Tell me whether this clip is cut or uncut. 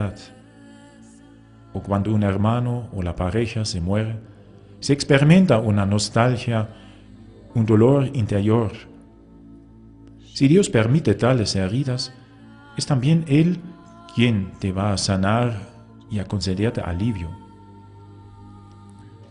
uncut